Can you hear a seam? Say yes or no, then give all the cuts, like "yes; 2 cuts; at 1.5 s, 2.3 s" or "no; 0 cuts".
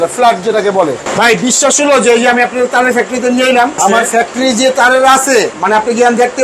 yes; 3 cuts; at 1.0 s, 3.8 s, 5.5 s